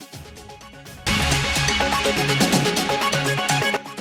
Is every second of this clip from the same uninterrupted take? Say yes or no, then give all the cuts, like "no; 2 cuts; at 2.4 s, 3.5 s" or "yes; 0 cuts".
no; 1 cut; at 1.0 s